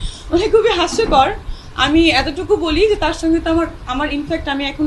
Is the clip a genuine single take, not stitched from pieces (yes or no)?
yes